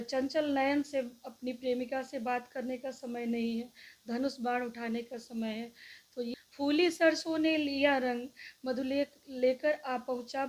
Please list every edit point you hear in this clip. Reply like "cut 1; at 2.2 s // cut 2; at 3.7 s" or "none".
cut 1; at 6.3 s